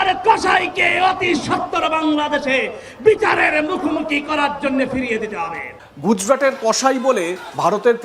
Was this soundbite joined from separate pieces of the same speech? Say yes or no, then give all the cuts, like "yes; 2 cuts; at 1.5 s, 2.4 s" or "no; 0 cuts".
yes; 1 cut; at 5.6 s